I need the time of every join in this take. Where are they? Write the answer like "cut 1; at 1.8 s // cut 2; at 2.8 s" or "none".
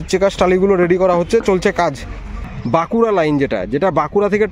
cut 1; at 2.4 s